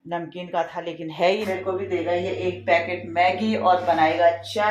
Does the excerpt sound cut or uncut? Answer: cut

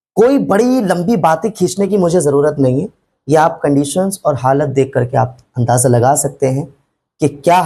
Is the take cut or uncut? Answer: uncut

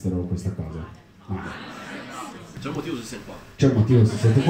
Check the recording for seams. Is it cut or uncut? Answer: cut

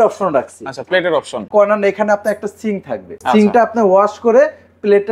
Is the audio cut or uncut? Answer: cut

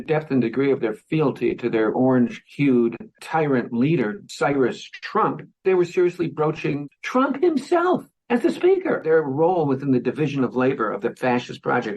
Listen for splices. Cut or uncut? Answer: cut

